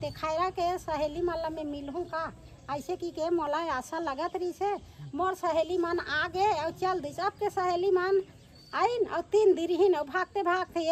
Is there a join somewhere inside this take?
no; 0 cuts

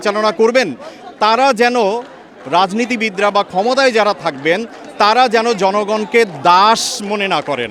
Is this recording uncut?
yes; 0 cuts

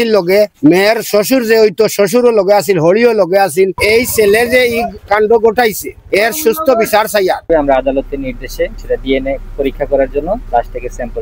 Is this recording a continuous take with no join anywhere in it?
no; 4 cuts; at 3.8 s, 7.5 s, 8.8 s, 10.4 s

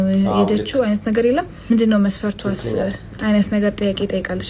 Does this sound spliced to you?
yes; 1 cut; at 3.4 s

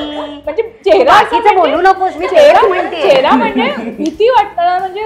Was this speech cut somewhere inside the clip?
no; 0 cuts

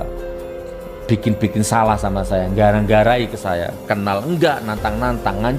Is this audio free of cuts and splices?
yes; 0 cuts

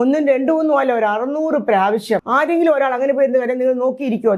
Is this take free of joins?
no; 1 cut; at 2.3 s

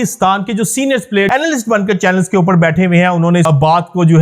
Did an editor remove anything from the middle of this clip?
yes; 2 cuts; at 1.3 s, 3.5 s

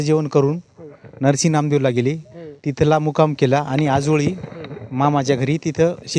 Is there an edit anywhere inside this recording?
no; 0 cuts

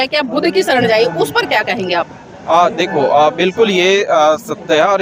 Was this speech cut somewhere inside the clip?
no; 0 cuts

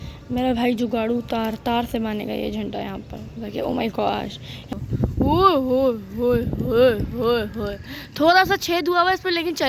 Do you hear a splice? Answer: yes; 1 cut; at 4.7 s

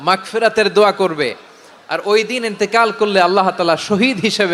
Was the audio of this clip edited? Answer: no; 0 cuts

